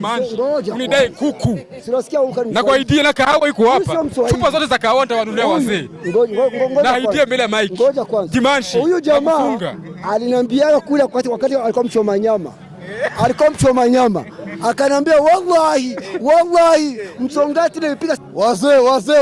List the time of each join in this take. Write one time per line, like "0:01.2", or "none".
0:18.2